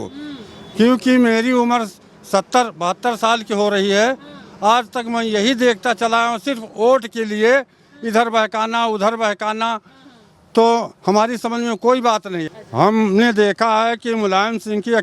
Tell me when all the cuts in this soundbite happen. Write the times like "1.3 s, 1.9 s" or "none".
12.4 s